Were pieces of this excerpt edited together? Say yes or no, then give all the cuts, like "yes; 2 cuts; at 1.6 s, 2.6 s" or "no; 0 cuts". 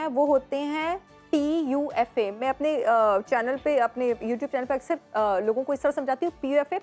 no; 0 cuts